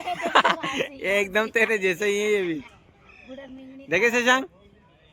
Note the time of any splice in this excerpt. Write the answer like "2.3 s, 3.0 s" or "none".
none